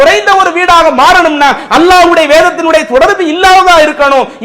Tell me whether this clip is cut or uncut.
uncut